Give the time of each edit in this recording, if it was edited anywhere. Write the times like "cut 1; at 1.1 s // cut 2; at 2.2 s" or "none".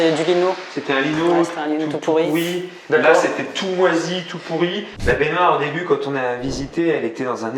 cut 1; at 4.9 s